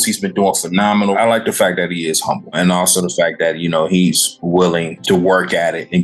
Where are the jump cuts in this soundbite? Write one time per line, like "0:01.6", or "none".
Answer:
0:01.1
0:02.6
0:04.9